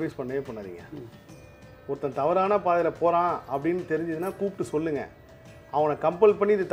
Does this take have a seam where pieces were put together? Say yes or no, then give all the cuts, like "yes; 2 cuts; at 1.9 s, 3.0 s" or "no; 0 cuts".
no; 0 cuts